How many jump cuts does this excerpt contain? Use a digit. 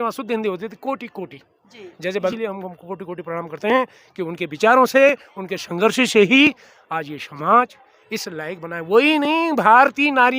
1